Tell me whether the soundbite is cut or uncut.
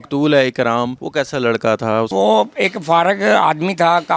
cut